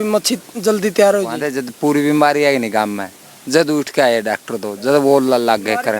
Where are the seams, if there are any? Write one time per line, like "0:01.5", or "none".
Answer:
0:01.4